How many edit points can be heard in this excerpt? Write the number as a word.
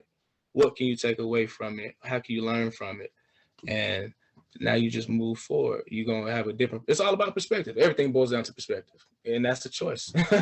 zero